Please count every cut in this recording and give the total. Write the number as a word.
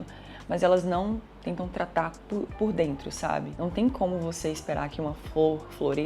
zero